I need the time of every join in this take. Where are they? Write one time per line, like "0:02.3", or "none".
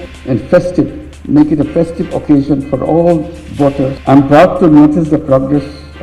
0:04.0

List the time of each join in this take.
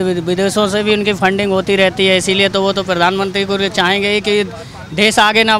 none

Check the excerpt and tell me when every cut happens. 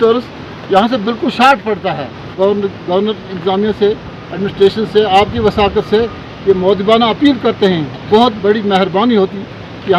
0:02.3

